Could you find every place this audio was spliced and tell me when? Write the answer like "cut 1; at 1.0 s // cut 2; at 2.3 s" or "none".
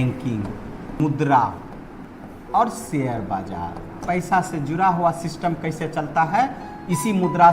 cut 1; at 1.0 s // cut 2; at 2.0 s // cut 3; at 4.0 s